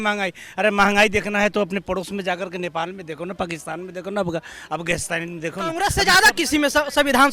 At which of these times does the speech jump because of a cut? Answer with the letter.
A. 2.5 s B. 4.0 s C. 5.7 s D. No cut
C